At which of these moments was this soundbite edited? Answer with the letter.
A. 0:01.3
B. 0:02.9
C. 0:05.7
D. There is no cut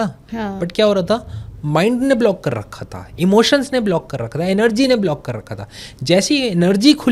D